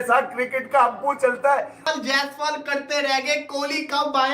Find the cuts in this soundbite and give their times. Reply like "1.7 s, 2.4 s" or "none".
1.8 s